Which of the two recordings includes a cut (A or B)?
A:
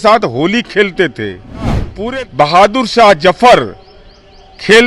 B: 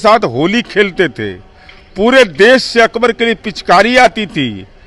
A